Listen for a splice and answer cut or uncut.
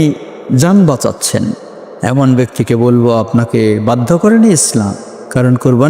uncut